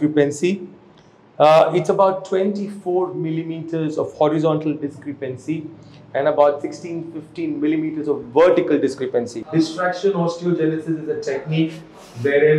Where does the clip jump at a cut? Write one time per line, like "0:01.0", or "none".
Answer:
0:09.4